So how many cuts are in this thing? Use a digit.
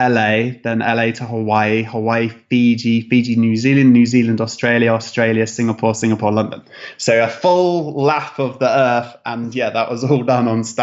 0